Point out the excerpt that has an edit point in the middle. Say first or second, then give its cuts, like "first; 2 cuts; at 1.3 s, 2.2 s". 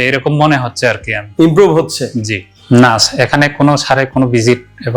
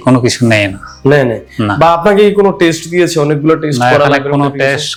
first; 1 cut; at 2.5 s